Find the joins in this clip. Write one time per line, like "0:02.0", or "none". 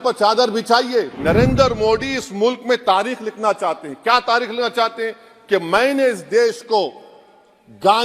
0:01.1

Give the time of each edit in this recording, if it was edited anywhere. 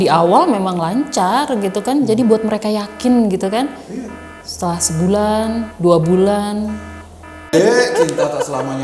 0:07.5

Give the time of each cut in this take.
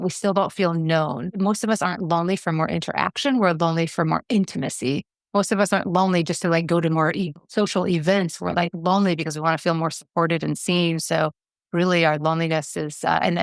0:01.3

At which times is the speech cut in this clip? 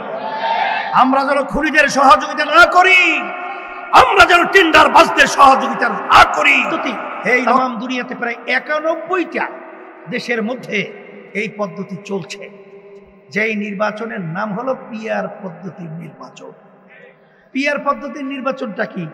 0:07.4

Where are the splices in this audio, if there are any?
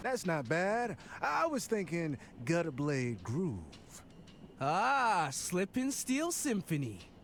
none

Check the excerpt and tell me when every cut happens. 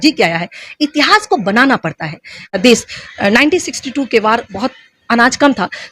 0:02.5

